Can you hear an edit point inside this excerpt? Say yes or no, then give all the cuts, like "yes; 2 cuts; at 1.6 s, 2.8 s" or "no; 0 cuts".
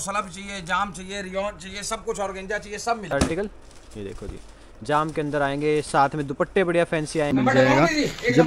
yes; 2 cuts; at 3.1 s, 7.3 s